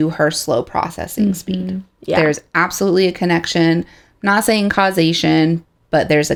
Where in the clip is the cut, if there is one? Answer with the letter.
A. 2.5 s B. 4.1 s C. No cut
C